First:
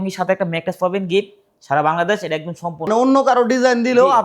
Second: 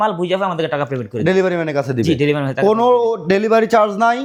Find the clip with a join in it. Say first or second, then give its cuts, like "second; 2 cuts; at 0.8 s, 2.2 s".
first; 1 cut; at 2.9 s